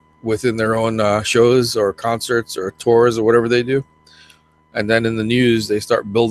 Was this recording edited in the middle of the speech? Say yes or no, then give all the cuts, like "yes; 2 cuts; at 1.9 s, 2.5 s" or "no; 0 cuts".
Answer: yes; 1 cut; at 3.0 s